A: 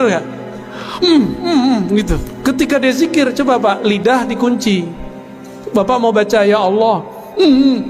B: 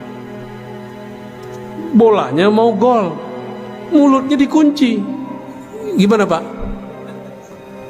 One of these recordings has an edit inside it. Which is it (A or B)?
A